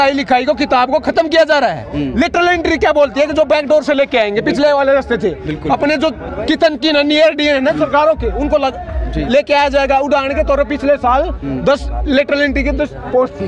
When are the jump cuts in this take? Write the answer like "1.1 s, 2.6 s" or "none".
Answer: none

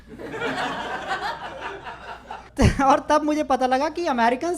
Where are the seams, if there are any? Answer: 2.4 s

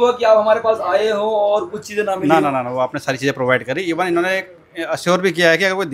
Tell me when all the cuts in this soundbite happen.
none

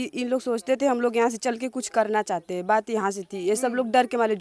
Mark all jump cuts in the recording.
none

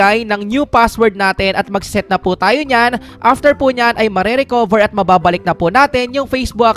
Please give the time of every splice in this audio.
none

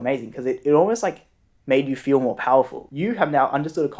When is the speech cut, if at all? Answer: 2.8 s

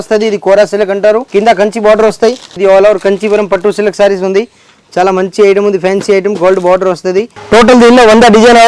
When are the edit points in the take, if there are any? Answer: 1.2 s, 2.6 s, 7.3 s

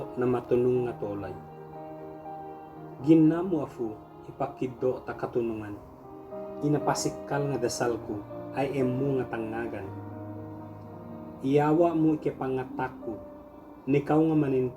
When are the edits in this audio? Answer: 1.3 s, 3.0 s, 9.9 s, 11.4 s

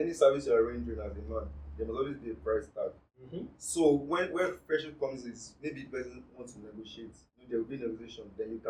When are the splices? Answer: none

